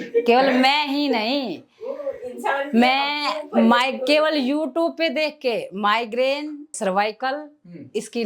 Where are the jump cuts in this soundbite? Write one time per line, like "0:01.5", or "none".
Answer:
0:06.7